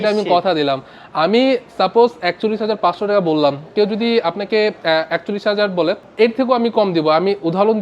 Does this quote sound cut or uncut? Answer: cut